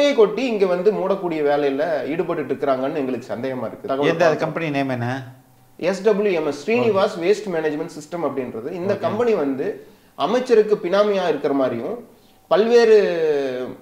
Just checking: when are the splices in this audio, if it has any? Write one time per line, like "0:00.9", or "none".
0:03.8